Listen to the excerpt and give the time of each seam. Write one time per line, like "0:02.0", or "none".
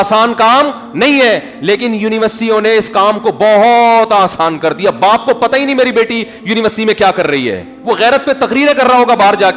none